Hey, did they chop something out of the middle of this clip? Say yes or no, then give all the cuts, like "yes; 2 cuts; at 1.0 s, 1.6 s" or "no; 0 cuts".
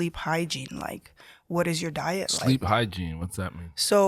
no; 0 cuts